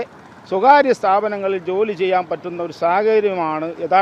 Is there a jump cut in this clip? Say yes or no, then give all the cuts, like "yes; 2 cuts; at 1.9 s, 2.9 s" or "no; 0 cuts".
no; 0 cuts